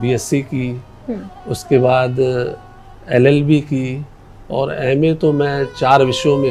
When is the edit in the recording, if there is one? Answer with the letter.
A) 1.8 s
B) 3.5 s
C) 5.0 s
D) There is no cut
D